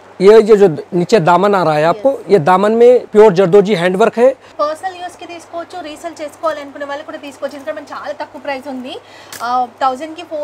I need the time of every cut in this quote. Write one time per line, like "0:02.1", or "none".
0:03.1
0:04.6